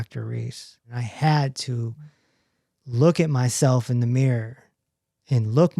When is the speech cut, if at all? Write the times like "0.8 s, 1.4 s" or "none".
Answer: 1.0 s